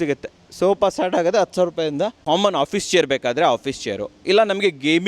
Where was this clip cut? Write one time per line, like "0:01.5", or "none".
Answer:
0:02.2